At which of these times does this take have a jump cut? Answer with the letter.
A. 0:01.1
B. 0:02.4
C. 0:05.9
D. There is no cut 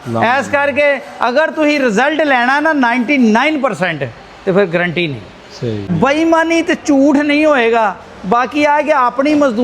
C